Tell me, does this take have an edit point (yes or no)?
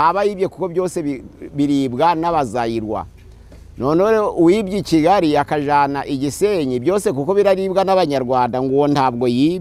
no